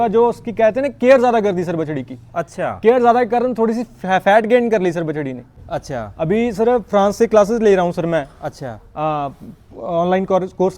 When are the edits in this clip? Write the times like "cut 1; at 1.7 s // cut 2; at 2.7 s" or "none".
cut 1; at 5.6 s

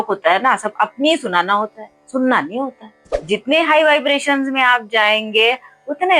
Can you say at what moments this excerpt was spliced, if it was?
cut 1; at 3.1 s

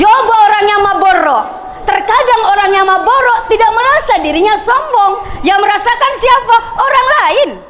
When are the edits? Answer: none

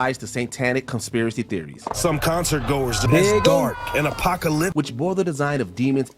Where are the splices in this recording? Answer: cut 1; at 3.1 s // cut 2; at 4.7 s

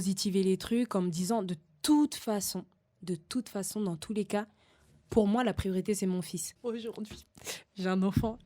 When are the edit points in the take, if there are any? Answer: cut 1; at 6.5 s

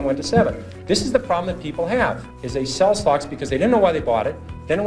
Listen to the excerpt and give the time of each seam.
cut 1; at 2.3 s

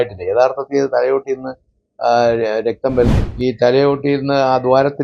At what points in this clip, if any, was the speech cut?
cut 1; at 3.2 s

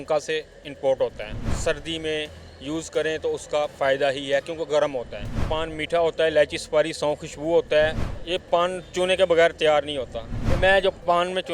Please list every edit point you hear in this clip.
cut 1; at 1.5 s // cut 2; at 5.5 s // cut 3; at 8.1 s // cut 4; at 10.4 s

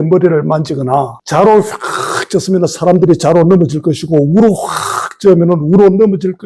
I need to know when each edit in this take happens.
cut 1; at 1.2 s

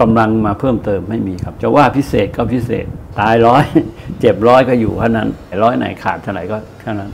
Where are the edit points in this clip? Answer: cut 1; at 1.4 s // cut 2; at 3.0 s // cut 3; at 5.5 s

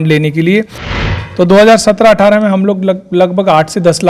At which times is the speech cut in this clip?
cut 1; at 1.0 s

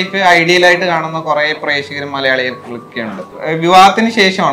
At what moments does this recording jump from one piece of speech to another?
cut 1; at 3.3 s

